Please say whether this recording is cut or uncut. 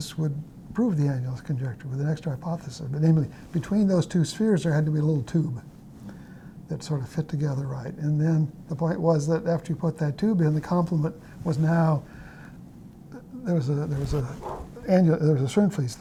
uncut